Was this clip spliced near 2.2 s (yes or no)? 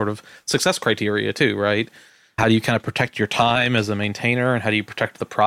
yes